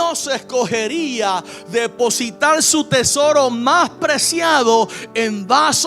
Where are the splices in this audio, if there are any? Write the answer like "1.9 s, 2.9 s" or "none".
none